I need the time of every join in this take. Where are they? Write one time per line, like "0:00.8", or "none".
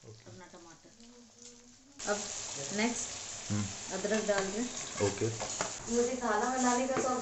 0:05.8